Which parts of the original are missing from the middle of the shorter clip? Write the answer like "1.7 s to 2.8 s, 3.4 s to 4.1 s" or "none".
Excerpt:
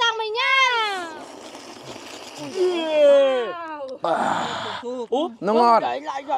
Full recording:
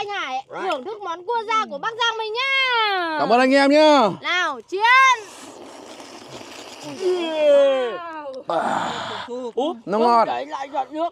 3.0 s to 5.4 s